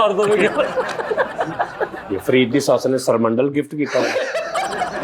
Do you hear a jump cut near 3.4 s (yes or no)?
no